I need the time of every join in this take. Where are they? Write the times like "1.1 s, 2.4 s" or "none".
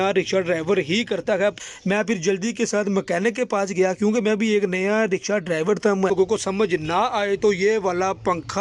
1.6 s, 6.1 s